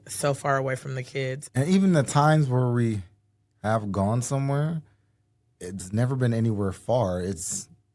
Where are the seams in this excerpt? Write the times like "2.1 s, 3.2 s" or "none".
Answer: 1.4 s